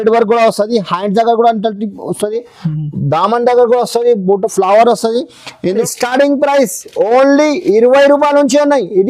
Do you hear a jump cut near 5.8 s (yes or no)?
yes